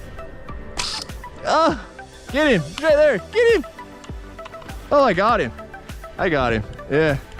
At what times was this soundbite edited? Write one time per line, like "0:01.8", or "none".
none